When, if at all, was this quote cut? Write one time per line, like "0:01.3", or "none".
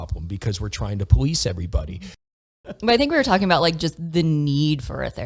0:02.5